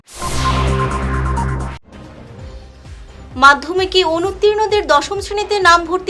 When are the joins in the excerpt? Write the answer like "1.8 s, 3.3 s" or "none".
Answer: 1.7 s, 2.7 s